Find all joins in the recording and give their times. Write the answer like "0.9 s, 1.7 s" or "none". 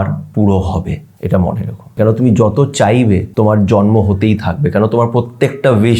1.1 s, 2.0 s, 3.3 s